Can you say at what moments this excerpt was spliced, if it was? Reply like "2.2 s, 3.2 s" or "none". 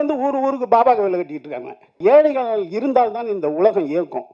2.0 s